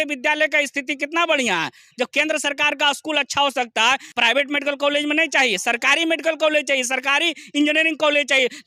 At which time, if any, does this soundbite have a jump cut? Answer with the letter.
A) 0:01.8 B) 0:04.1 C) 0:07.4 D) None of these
B